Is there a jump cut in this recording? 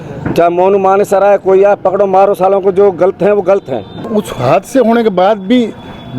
yes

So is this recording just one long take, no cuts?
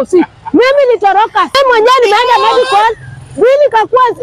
no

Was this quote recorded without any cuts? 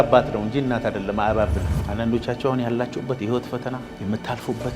no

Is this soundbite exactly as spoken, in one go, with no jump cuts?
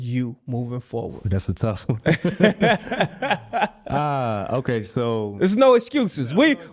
no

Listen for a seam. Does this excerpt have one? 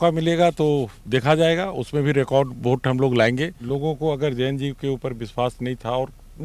yes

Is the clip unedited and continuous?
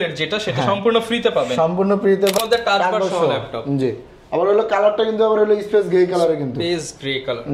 no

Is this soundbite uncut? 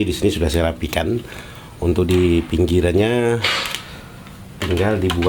yes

